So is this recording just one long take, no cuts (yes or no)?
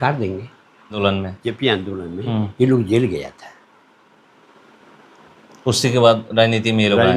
no